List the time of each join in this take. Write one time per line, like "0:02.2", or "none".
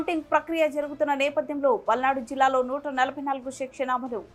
none

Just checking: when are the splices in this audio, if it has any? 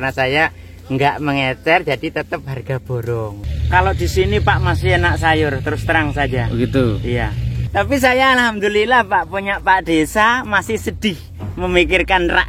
0:03.4
0:07.6

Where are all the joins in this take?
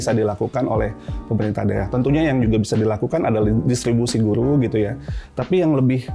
none

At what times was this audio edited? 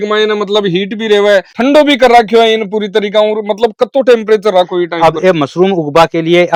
none

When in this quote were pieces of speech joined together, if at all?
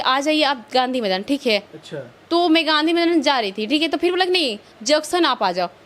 none

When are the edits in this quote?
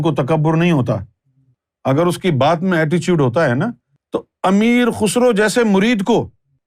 0:01.7

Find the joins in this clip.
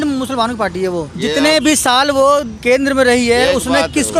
0:01.1
0:02.5

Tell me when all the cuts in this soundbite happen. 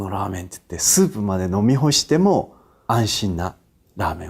0:02.7

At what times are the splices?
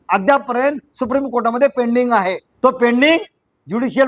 0:02.5

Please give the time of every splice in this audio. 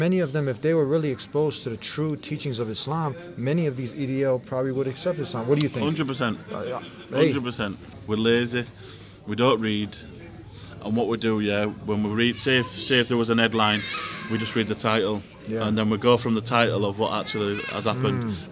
0:07.8

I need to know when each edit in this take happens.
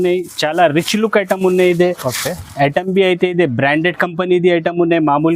none

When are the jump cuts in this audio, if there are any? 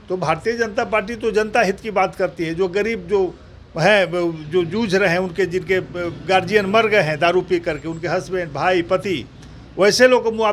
none

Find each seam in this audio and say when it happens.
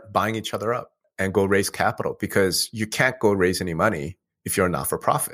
0:01.0

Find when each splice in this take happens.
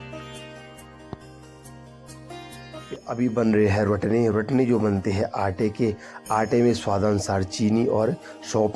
0:03.1

